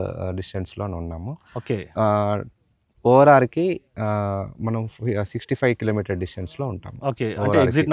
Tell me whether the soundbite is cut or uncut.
uncut